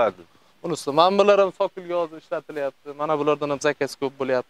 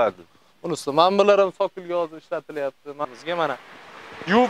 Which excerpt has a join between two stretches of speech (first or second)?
second